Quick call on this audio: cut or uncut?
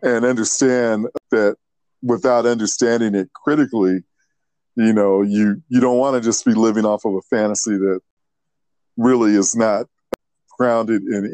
cut